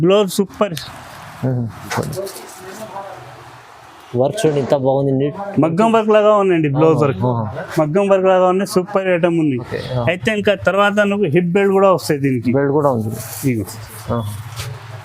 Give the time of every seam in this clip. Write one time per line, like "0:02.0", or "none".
0:02.0